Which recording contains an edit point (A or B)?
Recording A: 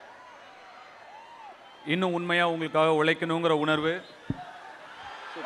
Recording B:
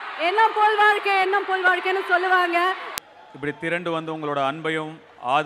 B